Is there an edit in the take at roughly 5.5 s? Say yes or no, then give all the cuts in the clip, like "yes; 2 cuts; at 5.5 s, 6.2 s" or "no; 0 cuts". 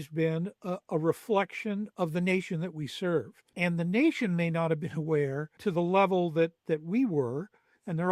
yes; 3 cuts; at 1.9 s, 3.4 s, 5.5 s